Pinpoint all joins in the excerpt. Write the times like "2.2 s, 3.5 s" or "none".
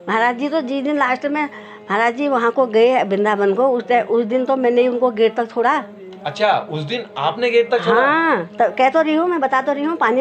none